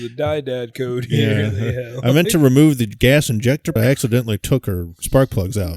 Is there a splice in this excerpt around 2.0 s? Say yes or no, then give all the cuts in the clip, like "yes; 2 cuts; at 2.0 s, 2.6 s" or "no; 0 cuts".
no; 1 cut; at 3.8 s